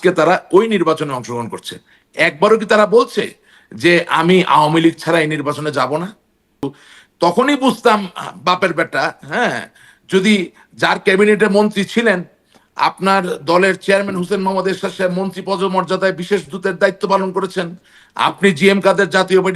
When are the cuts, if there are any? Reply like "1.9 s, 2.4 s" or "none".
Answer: 6.6 s